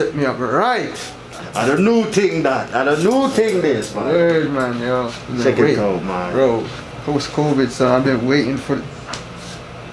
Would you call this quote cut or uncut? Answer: cut